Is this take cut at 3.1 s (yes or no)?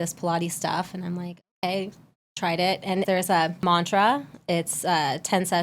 yes